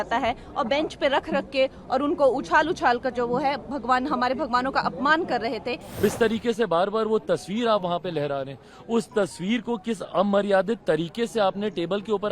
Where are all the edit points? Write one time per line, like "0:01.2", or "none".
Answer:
0:06.0